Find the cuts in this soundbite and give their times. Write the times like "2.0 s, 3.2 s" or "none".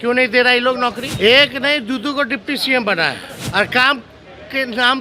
1.1 s, 3.3 s